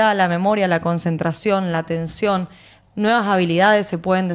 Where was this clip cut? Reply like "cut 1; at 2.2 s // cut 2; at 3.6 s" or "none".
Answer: none

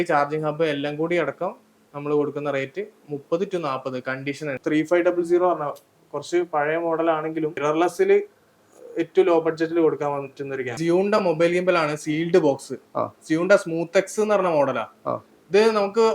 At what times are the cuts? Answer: cut 1; at 4.6 s // cut 2; at 7.6 s // cut 3; at 10.7 s

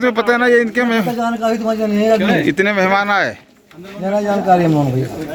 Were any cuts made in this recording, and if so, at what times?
none

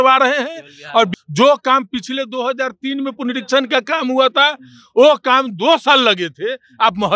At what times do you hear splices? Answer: cut 1; at 1.1 s

